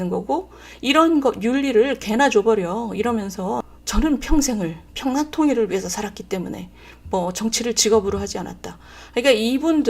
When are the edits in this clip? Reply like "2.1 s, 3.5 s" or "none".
3.6 s